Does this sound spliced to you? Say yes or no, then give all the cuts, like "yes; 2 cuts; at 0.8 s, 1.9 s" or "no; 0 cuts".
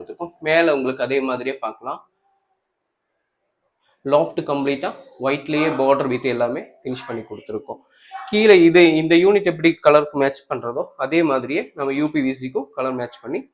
no; 0 cuts